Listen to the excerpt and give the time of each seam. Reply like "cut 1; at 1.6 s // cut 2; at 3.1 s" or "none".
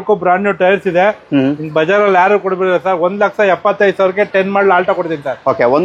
none